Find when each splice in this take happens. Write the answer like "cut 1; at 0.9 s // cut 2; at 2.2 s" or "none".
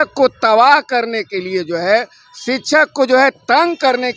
none